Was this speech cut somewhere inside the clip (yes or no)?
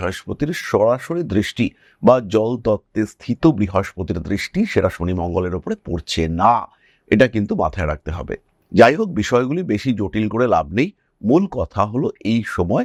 no